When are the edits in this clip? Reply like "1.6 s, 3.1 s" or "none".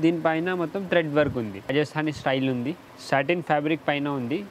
1.7 s